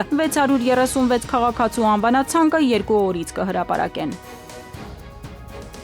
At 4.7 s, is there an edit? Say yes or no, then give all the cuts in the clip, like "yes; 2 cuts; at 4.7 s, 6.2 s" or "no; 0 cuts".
yes; 1 cut; at 4.7 s